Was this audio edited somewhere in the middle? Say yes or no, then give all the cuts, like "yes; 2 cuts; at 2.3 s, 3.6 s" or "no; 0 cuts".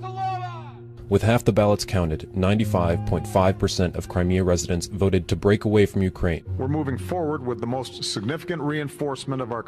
no; 0 cuts